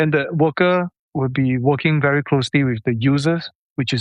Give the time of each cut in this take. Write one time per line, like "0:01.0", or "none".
0:01.0